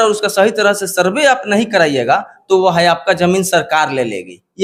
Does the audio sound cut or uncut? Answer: uncut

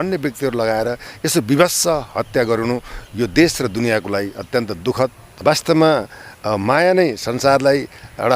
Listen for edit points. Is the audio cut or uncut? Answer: cut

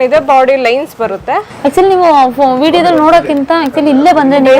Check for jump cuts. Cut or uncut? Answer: cut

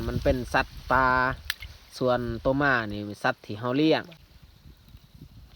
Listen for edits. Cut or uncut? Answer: cut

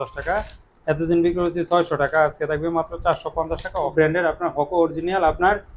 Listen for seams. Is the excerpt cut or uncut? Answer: cut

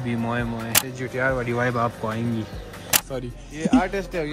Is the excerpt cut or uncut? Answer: cut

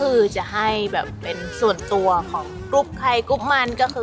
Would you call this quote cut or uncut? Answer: uncut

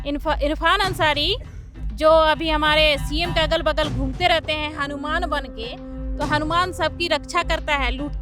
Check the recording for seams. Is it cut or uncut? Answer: cut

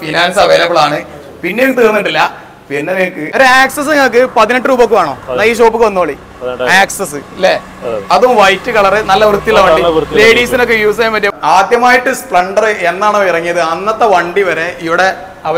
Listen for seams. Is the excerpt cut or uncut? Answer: cut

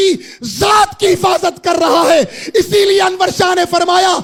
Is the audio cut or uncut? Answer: uncut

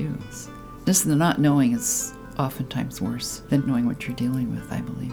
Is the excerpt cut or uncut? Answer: cut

